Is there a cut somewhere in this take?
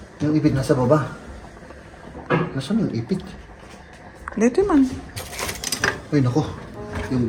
no; 0 cuts

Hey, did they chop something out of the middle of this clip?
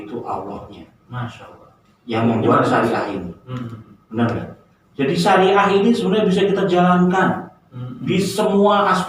no; 0 cuts

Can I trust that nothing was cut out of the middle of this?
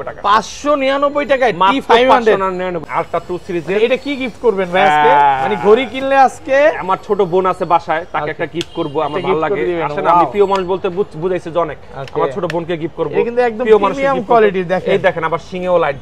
no; 1 cut; at 2.8 s

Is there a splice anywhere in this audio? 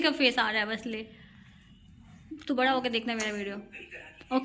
no; 0 cuts

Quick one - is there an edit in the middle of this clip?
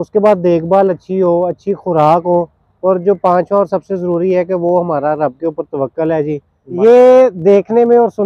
yes; 1 cut; at 6.6 s

